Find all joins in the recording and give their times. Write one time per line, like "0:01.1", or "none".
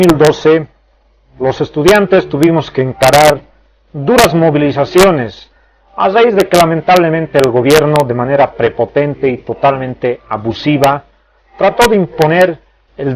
0:05.6